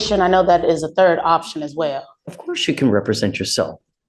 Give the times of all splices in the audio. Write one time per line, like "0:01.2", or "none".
none